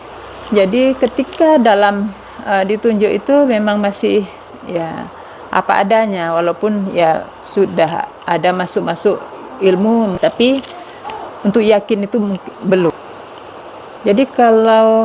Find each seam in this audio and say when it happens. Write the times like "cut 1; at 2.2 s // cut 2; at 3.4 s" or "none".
none